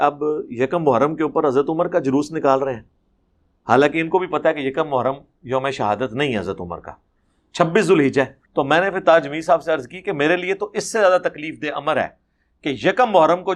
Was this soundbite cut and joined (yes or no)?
yes